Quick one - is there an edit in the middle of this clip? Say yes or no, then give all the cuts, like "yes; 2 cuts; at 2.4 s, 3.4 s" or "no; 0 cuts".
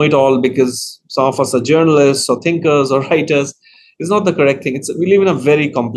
no; 0 cuts